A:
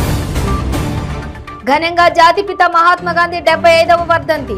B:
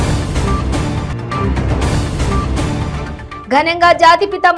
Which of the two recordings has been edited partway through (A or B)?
A